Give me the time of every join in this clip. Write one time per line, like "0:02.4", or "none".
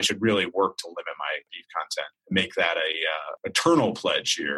0:01.9
0:03.3